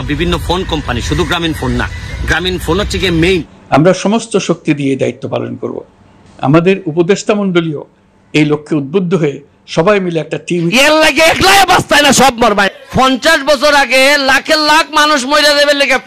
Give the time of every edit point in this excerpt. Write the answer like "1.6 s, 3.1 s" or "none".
3.6 s, 10.7 s